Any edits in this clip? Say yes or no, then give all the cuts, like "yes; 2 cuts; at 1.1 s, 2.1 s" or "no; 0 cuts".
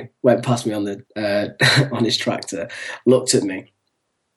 yes; 1 cut; at 1.0 s